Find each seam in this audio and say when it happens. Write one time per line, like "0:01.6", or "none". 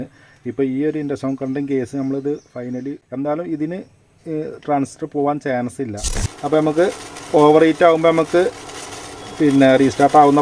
0:03.0
0:06.1